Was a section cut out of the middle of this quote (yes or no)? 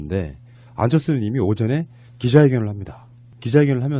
no